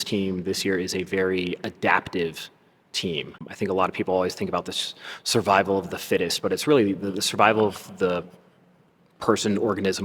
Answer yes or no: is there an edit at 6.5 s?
no